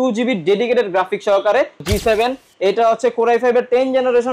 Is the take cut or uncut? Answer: cut